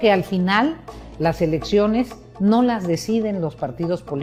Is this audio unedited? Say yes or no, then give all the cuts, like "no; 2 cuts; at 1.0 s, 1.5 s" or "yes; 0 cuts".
yes; 0 cuts